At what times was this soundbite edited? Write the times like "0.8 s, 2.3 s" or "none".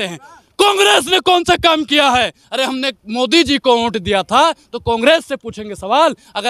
none